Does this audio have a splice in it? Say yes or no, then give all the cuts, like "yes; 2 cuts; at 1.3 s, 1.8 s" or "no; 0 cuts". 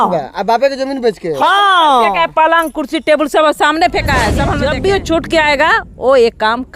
yes; 1 cut; at 4.5 s